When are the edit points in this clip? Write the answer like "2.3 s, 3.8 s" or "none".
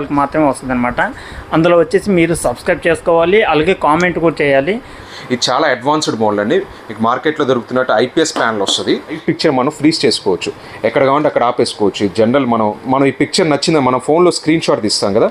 4.9 s, 9.2 s, 12.8 s